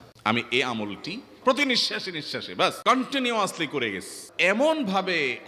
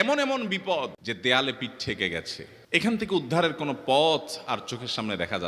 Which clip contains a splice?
first; 3 cuts; at 1.3 s, 2.8 s, 4.3 s

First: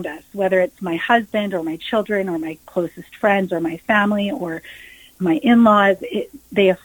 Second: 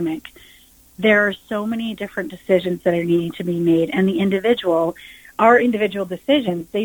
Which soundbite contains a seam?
first; 1 cut; at 5.1 s

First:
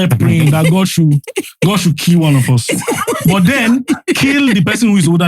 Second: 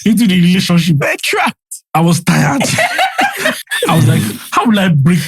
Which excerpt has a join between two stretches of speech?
second; 1 cut; at 3.6 s

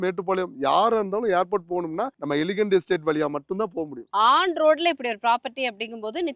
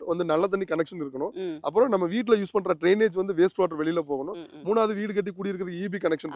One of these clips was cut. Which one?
first; 2 cuts; at 2.1 s, 4.0 s

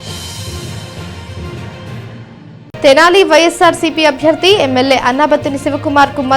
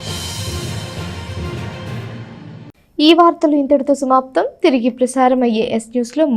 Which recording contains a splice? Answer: first; 1 cut; at 2.2 s

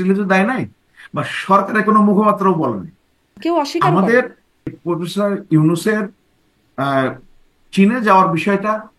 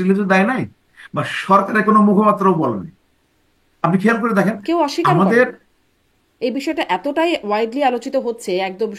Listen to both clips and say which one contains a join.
first; 2 cuts; at 3.4 s, 4.8 s

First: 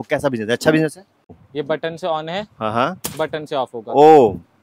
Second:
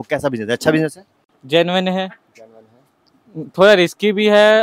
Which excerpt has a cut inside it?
first; 1 cut; at 1.4 s

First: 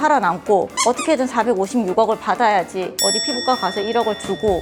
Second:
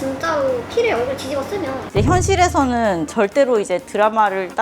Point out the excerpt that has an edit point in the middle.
second; 1 cut; at 1.8 s

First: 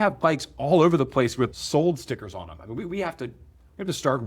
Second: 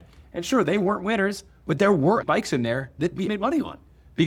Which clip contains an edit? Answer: first; 1 cut; at 1.5 s

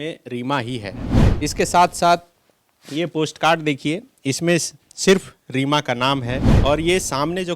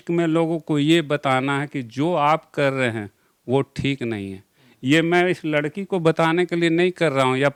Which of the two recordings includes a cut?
first; 2 cuts; at 1.2 s, 6.5 s

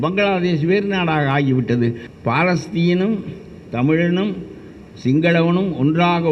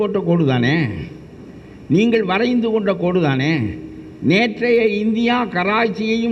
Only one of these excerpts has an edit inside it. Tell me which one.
first; 1 cut; at 2.1 s

